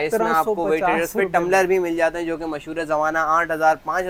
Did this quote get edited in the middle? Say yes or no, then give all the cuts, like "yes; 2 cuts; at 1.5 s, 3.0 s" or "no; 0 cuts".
no; 0 cuts